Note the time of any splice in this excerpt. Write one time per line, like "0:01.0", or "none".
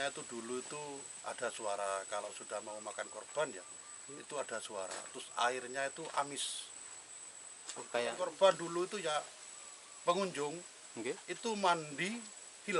0:08.3